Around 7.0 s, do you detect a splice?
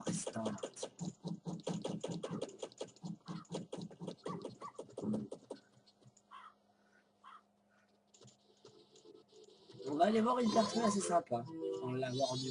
no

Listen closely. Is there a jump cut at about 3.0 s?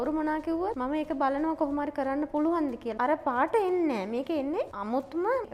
yes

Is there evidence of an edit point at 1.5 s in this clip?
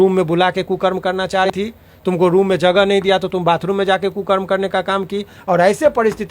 yes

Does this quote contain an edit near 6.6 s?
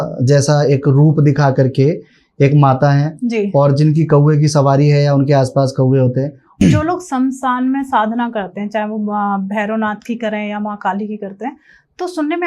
yes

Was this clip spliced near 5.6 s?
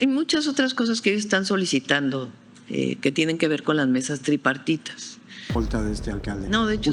yes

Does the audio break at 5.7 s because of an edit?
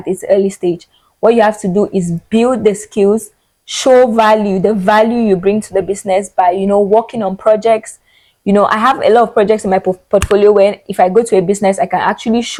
no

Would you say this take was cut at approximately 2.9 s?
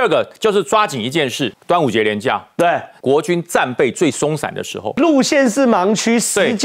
yes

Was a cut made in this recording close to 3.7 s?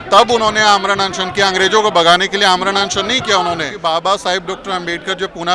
yes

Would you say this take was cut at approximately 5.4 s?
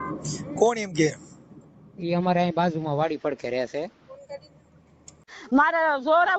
yes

